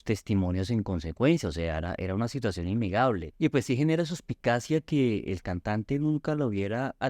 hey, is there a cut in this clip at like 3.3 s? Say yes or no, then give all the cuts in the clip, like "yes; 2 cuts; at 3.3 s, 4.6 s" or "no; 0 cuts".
yes; 1 cut; at 3.3 s